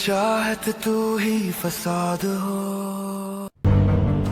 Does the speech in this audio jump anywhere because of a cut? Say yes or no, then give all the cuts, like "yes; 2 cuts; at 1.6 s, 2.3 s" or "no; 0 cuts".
no; 0 cuts